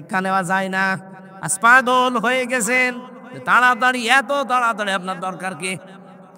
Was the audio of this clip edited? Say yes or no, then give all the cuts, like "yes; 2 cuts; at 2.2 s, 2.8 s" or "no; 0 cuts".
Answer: no; 0 cuts